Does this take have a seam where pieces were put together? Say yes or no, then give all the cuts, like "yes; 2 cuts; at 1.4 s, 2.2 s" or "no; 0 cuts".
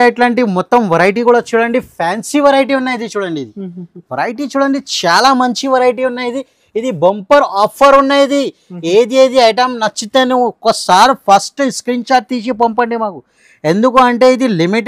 no; 0 cuts